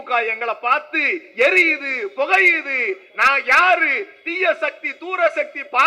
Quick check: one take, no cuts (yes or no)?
yes